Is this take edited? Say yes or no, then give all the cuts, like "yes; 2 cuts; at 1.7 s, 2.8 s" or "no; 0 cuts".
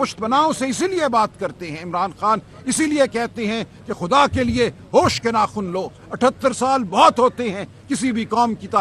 no; 0 cuts